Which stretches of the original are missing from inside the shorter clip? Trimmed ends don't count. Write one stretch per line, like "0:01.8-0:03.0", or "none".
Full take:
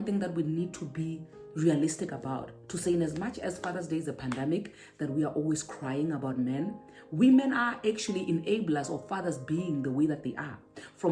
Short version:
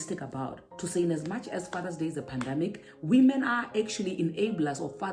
0:04.8-0:07.0